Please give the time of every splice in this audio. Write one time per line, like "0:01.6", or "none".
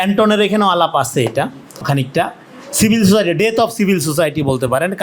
0:01.8